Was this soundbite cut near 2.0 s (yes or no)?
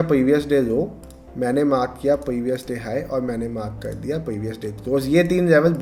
no